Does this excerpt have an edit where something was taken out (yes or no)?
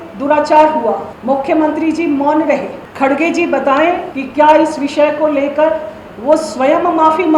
yes